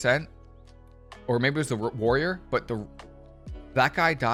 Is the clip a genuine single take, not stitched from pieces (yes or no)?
yes